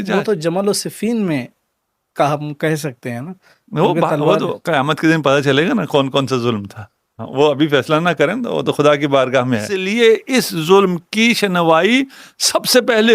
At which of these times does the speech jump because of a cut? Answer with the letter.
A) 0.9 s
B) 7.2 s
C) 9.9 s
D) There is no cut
C